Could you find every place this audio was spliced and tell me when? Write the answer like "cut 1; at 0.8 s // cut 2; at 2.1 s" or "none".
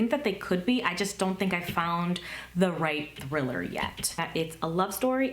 cut 1; at 4.2 s